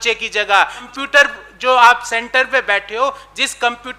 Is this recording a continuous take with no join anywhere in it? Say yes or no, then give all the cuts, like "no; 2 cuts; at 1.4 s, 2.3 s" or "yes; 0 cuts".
no; 1 cut; at 0.9 s